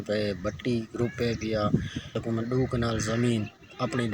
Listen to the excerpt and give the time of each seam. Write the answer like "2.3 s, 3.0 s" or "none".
2.2 s

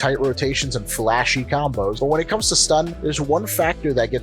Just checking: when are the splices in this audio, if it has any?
2.0 s

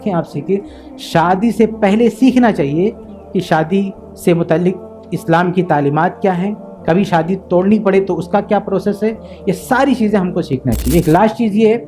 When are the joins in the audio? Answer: none

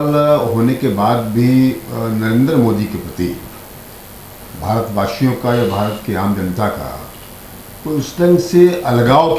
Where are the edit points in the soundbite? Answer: none

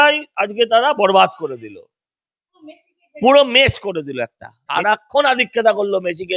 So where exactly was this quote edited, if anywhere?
4.7 s

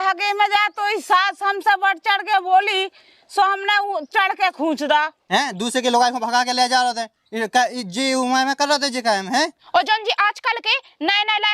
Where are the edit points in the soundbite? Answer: 5.2 s, 9.6 s

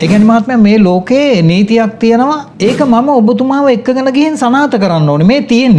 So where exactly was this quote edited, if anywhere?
2.5 s

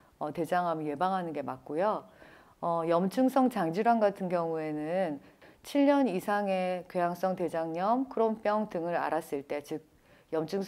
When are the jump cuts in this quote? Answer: 5.4 s

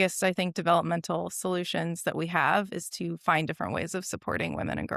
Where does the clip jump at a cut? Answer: none

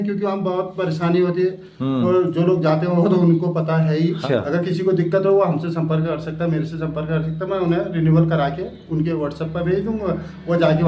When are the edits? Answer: 4.2 s

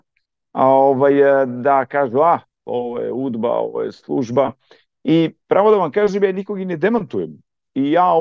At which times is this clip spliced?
none

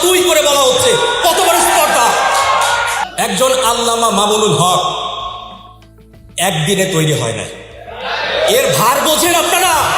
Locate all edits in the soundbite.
3.1 s

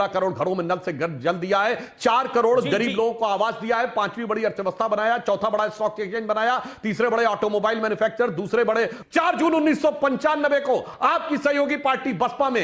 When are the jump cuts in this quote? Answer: 9.0 s

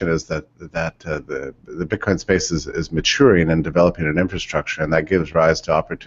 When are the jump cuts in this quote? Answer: 4.5 s

